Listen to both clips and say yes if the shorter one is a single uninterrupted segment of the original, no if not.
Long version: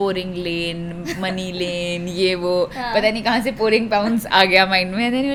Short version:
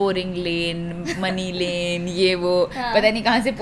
yes